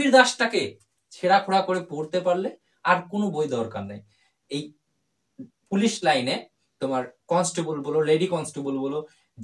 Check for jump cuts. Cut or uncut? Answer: uncut